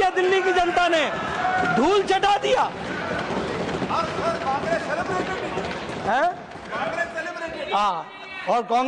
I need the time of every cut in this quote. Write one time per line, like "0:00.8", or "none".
none